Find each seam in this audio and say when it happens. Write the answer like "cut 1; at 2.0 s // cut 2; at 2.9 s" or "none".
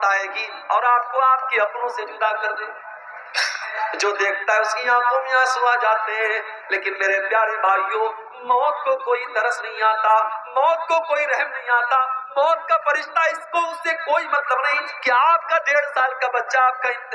cut 1; at 3.6 s